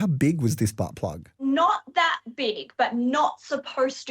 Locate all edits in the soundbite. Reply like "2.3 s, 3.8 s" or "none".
1.3 s